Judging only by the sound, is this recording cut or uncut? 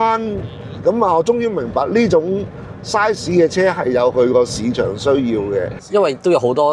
cut